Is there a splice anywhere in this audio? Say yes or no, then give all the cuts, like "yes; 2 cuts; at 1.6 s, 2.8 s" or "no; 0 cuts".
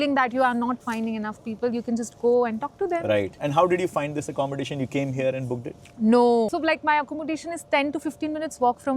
yes; 2 cuts; at 3.4 s, 6.5 s